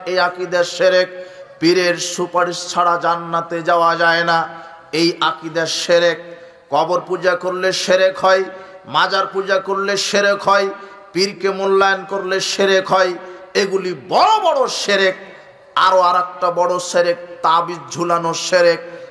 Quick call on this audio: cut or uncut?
uncut